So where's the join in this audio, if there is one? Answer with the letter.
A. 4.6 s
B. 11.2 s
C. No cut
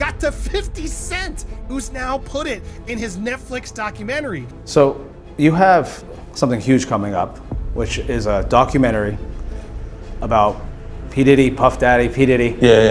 A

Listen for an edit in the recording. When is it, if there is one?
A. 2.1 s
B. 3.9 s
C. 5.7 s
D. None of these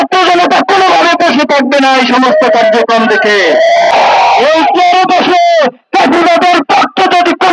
B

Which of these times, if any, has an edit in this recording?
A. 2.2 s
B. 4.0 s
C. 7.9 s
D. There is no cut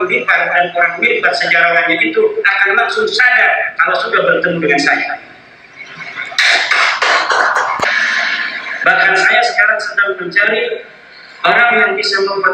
C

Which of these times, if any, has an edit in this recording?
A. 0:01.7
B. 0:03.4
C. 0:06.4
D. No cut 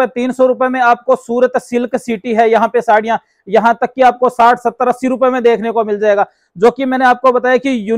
D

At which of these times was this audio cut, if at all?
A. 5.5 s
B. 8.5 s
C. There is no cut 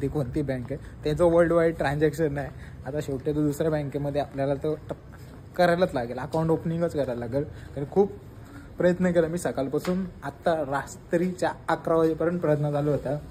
C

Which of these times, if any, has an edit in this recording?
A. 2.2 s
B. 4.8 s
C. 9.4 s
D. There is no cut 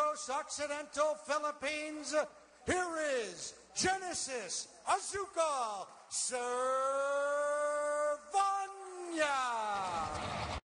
C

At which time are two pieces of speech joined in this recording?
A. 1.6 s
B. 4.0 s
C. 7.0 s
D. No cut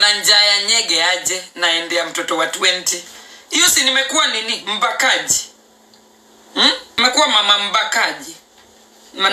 C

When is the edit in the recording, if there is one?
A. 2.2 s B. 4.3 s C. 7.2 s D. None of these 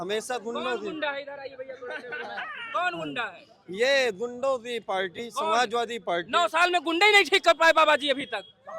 D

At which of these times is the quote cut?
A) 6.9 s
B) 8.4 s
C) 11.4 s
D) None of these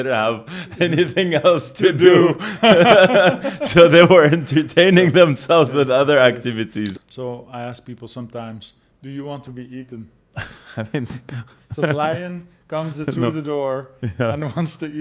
A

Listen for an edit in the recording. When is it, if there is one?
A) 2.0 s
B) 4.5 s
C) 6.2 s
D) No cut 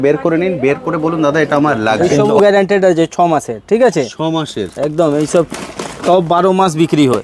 A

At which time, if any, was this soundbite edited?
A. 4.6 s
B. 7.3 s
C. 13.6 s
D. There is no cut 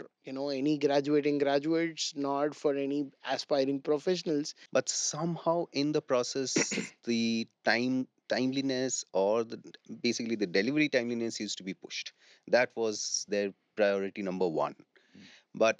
A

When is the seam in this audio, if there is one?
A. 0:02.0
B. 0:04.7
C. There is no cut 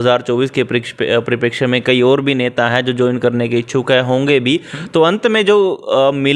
C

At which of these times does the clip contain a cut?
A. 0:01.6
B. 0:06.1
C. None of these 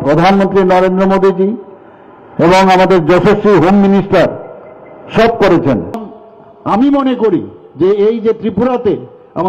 B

